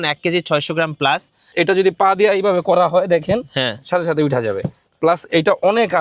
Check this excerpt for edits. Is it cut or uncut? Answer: cut